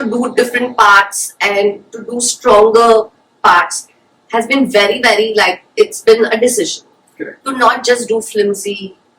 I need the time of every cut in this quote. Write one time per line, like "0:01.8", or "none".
none